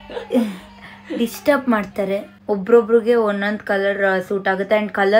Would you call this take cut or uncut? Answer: cut